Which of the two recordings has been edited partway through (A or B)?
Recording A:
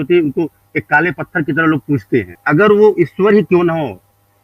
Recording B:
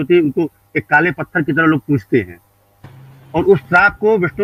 A